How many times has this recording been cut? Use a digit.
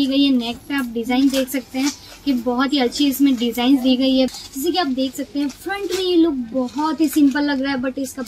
1